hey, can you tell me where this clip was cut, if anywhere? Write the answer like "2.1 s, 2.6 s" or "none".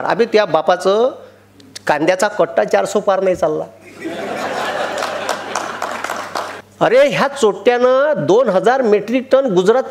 6.5 s